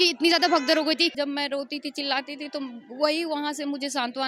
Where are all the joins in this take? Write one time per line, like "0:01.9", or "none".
0:01.1

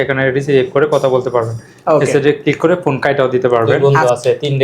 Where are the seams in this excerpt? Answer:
0:03.7

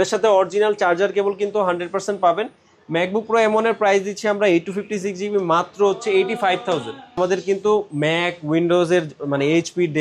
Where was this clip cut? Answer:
0:07.2

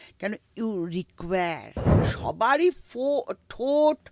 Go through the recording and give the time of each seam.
0:02.1

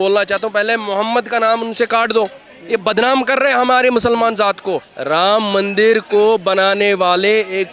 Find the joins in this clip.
0:04.9

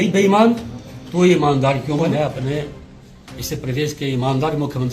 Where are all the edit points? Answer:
0:02.1

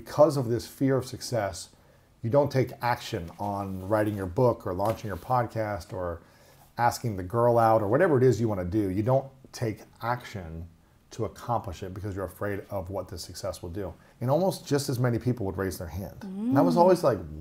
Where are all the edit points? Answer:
0:14.0

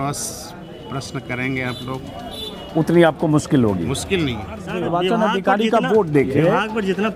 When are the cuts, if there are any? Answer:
0:04.6

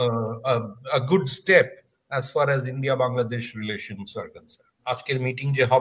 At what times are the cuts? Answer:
0:04.8

